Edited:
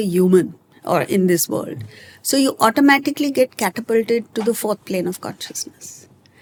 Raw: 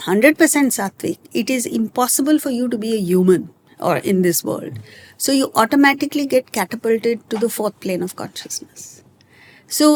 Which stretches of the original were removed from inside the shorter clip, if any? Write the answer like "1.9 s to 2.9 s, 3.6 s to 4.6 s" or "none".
none